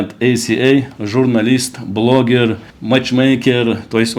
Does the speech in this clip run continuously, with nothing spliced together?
yes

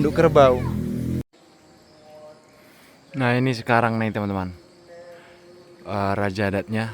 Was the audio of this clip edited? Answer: yes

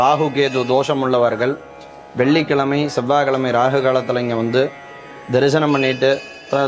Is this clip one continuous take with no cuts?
yes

